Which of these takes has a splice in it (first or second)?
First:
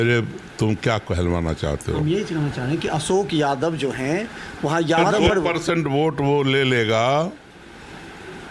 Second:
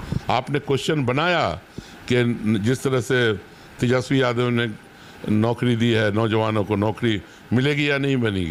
first